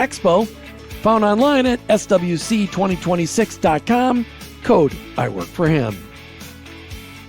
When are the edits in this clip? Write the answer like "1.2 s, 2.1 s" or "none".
6.0 s